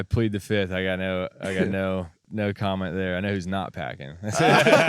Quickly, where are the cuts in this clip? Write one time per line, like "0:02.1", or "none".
0:02.3